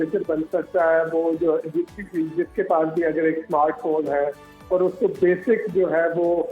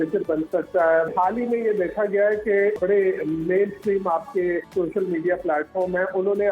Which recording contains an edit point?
second; 3 cuts; at 1.1 s, 2.8 s, 4.7 s

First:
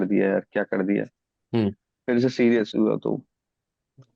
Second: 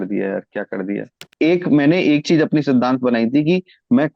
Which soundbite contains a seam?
second; 1 cut; at 1.2 s

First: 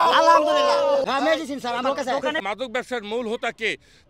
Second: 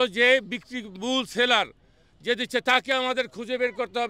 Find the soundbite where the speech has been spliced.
first; 2 cuts; at 1.0 s, 2.4 s

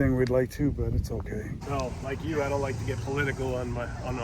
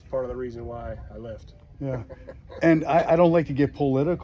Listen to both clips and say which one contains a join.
first; 1 cut; at 2.0 s

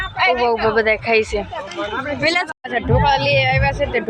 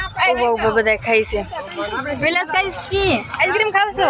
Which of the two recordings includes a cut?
first; 1 cut; at 2.5 s

